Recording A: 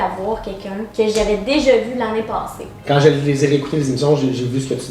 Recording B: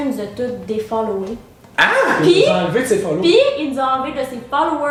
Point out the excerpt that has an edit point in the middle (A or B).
A